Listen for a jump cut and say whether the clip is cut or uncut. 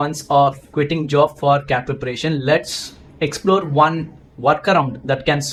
uncut